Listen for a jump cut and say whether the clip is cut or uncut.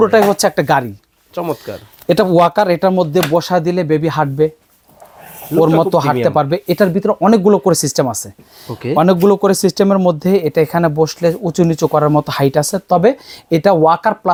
uncut